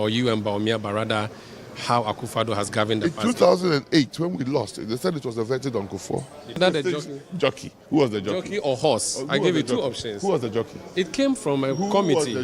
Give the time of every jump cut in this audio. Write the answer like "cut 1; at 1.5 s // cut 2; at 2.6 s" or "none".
cut 1; at 6.6 s